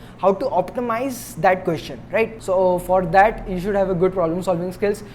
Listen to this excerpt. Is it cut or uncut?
cut